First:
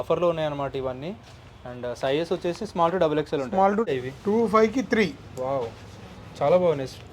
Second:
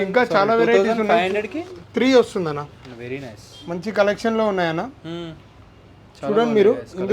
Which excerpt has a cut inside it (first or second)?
first